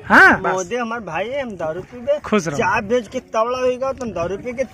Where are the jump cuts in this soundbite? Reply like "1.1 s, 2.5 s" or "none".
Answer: none